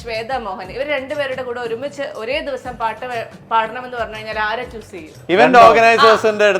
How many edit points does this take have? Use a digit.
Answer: 1